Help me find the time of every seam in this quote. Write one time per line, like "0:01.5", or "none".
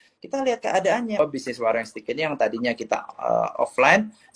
0:01.2

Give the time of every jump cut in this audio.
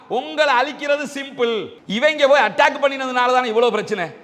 0:01.8

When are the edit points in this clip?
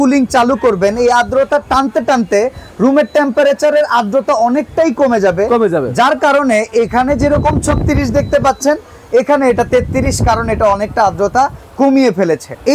none

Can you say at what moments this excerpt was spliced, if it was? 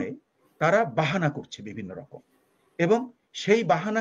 none

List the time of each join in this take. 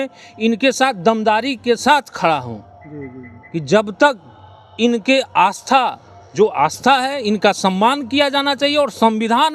none

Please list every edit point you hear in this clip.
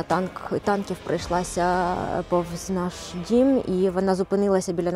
none

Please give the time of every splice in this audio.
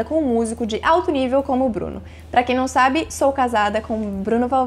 none

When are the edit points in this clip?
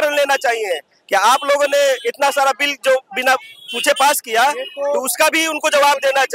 none

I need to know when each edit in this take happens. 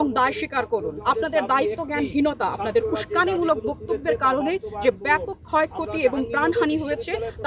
0:00.9

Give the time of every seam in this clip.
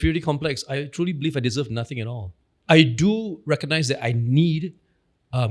0:00.8
0:02.3

